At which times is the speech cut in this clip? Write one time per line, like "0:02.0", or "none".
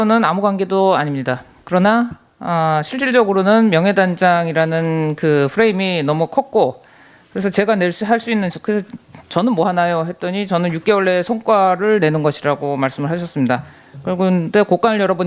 0:04.3